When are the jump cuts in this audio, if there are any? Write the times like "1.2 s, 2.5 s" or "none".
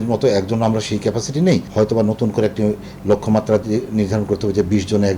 1.7 s